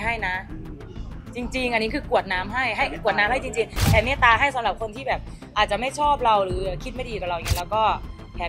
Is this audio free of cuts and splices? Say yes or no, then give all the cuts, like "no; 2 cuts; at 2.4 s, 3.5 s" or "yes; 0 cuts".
yes; 0 cuts